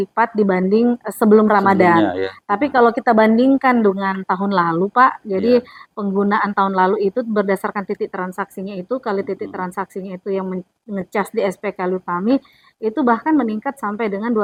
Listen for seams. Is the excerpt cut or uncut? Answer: uncut